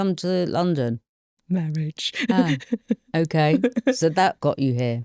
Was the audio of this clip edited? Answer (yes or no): no